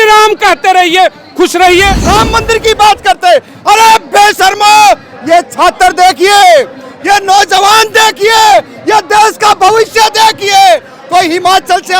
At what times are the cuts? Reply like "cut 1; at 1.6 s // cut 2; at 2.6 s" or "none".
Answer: cut 1; at 2.0 s